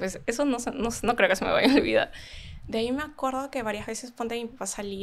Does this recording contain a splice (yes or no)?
no